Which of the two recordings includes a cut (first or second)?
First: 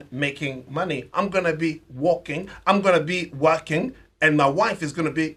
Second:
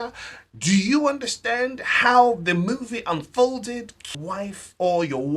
second